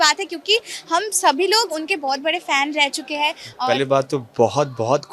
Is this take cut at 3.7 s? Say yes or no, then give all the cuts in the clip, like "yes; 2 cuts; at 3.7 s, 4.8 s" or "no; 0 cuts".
yes; 1 cut; at 3.7 s